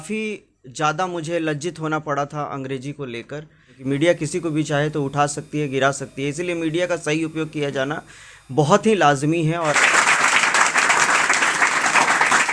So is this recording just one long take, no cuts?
no; 2 cuts; at 3.8 s, 9.7 s

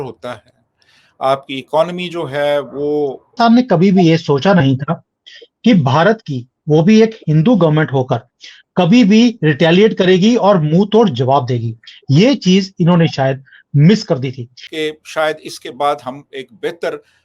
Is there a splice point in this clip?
yes; 2 cuts; at 3.3 s, 14.6 s

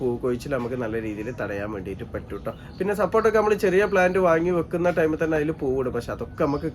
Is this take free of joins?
yes; 0 cuts

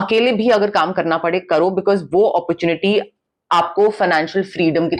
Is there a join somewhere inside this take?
no; 0 cuts

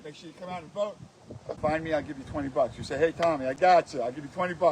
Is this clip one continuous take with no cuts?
no; 1 cut; at 1.6 s

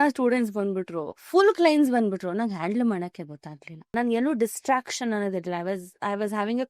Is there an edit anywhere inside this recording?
yes; 1 cut; at 3.9 s

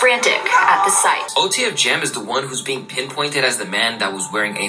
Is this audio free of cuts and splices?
no; 1 cut; at 1.2 s

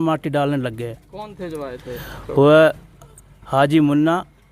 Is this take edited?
no; 0 cuts

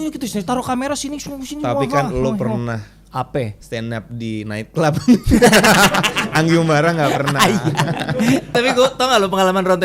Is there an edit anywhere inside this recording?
yes; 1 cut; at 8.5 s

